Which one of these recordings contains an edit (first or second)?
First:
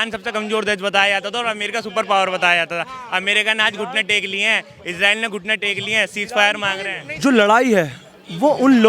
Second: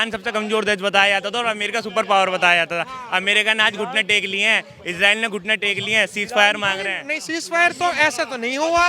first